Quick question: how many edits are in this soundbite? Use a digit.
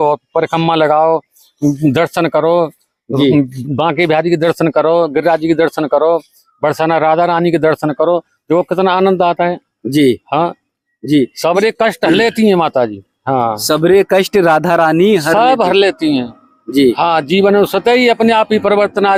0